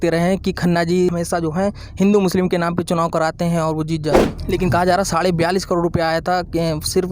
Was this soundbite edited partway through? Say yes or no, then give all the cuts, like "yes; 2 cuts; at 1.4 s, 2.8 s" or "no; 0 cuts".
yes; 1 cut; at 4.3 s